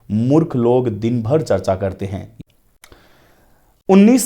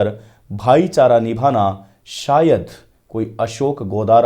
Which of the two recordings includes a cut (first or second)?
first